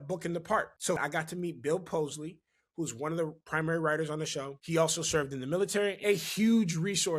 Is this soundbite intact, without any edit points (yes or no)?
no